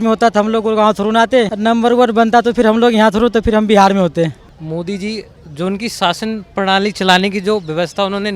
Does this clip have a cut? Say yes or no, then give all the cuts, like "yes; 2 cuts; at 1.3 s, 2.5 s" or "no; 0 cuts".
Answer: yes; 2 cuts; at 1.5 s, 4.5 s